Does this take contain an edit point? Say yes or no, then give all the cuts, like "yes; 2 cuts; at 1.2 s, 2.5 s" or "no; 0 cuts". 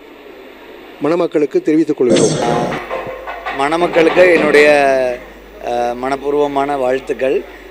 yes; 1 cut; at 2.4 s